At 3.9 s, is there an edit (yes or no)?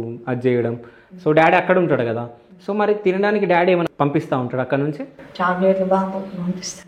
yes